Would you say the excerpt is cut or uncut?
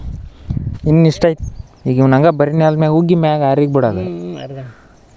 cut